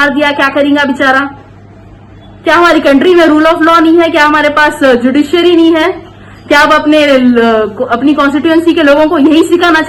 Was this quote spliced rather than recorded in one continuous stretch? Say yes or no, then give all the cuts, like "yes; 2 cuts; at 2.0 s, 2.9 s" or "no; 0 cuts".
no; 0 cuts